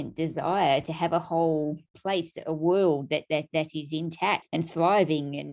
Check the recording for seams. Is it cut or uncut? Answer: cut